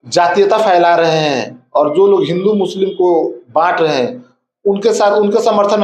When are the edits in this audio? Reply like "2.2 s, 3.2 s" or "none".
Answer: none

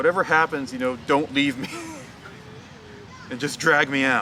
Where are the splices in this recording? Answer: none

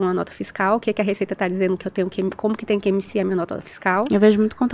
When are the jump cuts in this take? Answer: none

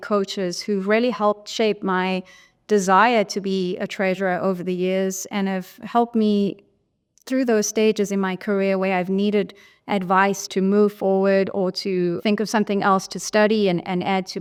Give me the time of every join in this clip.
none

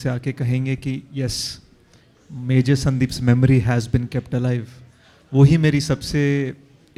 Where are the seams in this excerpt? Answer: none

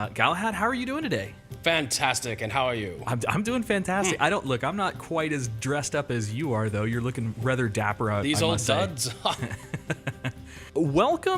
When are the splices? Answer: none

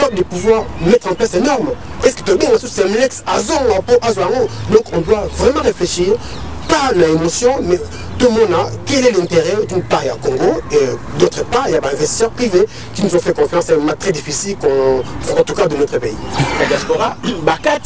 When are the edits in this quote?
16.6 s

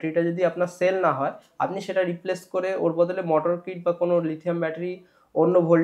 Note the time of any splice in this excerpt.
none

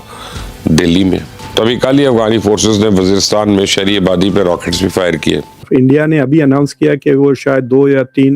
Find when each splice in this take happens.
1.5 s, 5.6 s

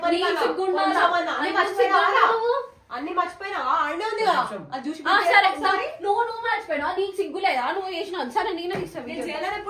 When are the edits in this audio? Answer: none

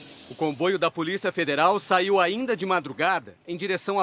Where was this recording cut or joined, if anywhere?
2.4 s

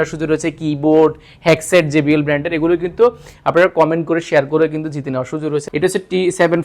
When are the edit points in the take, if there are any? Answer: 5.7 s

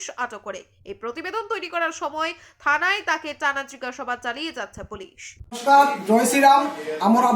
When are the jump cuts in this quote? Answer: 5.7 s

